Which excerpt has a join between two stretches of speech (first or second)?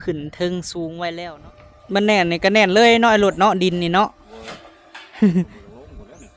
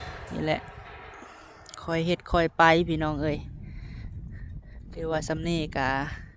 first